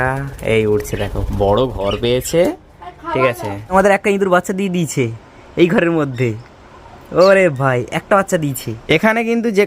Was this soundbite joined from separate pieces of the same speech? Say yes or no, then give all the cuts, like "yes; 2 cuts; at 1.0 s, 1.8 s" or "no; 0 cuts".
yes; 2 cuts; at 3.6 s, 8.7 s